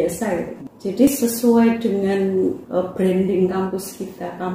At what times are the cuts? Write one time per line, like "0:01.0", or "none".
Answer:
0:01.1
0:02.6